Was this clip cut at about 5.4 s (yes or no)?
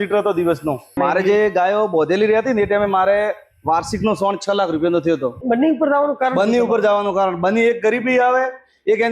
yes